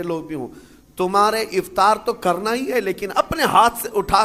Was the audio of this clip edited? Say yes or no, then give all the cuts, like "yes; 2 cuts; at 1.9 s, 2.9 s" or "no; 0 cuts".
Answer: no; 0 cuts